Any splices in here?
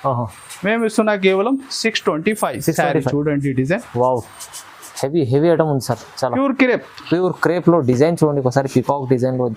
no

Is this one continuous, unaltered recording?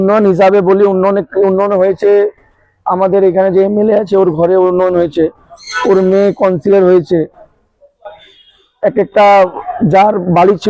yes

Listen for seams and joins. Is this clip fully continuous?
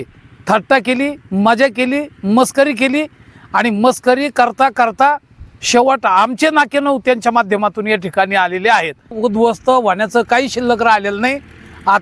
no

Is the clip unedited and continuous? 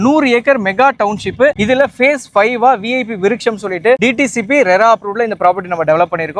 yes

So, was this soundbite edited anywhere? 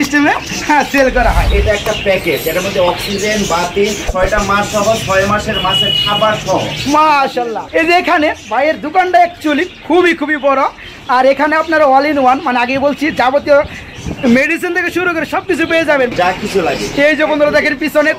yes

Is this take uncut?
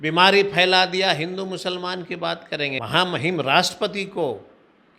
no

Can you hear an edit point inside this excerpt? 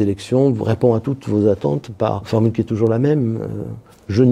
no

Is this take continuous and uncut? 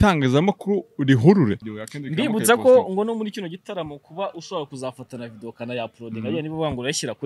no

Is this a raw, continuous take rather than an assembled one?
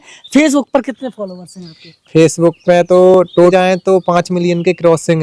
no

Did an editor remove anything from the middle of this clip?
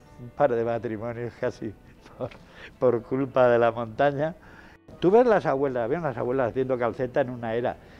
yes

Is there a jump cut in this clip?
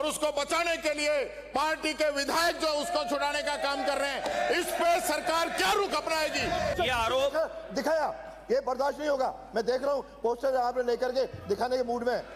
yes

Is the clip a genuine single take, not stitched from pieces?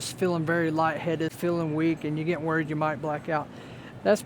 yes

